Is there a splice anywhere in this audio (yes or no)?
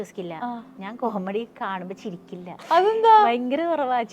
yes